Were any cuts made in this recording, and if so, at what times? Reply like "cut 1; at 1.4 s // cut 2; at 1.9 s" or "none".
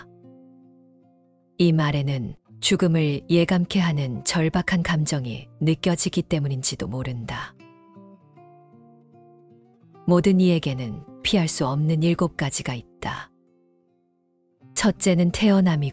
cut 1; at 7.5 s // cut 2; at 10.1 s